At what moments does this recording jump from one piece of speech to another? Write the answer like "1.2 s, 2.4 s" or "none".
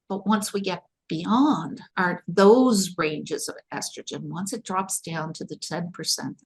1.8 s

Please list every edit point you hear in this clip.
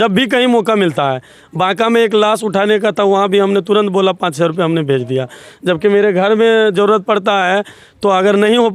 none

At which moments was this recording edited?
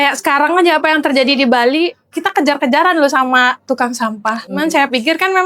4.5 s

